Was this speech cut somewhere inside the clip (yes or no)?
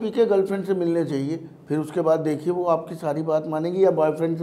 no